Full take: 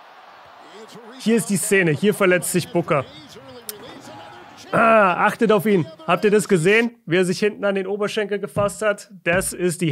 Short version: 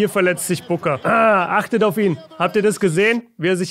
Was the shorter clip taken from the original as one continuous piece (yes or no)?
no